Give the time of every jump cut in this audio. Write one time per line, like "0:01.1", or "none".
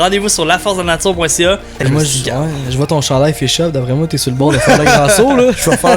0:01.7